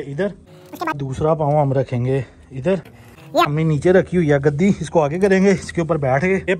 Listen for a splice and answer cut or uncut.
cut